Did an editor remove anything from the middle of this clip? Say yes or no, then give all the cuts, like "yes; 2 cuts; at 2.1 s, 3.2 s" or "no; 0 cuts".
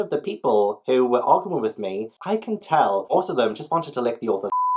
yes; 1 cut; at 2.2 s